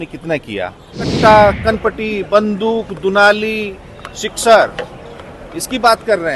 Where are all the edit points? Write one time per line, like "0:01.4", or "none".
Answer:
0:01.1